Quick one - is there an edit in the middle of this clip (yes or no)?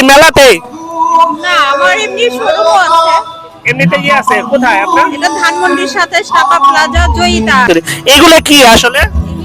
yes